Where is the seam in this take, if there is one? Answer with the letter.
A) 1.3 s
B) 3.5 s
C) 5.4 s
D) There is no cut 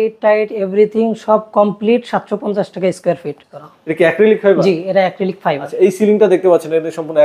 B